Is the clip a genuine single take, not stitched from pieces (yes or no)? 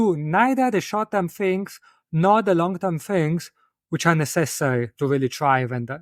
yes